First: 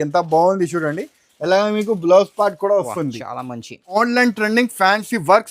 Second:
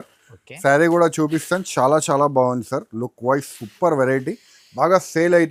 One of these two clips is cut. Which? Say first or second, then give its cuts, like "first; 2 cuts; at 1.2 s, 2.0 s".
first; 1 cut; at 4.0 s